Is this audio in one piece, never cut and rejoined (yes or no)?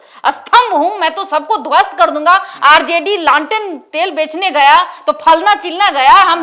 yes